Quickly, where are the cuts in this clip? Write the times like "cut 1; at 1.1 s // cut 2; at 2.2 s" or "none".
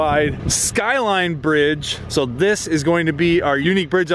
cut 1; at 2.0 s